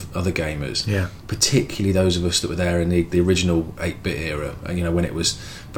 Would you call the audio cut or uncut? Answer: uncut